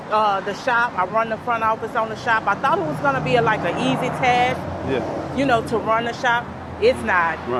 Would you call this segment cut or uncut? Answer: uncut